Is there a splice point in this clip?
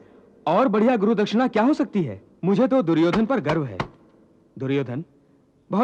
yes; 1 cut; at 2.2 s

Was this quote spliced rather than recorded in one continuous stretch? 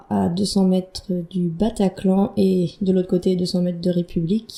no; 0 cuts

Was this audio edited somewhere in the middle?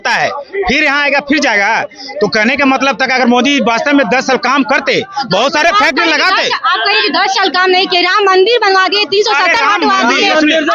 no; 0 cuts

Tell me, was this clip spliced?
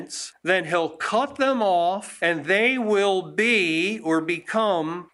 no; 0 cuts

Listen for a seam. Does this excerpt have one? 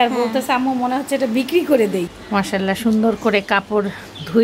yes; 1 cut; at 2.1 s

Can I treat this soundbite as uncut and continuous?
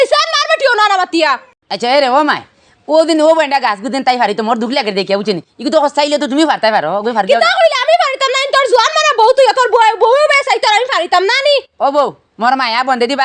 yes; 0 cuts

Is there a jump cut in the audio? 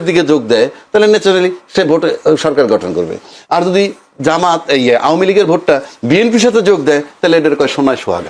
no; 0 cuts

